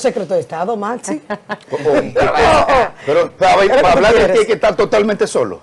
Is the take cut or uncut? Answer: uncut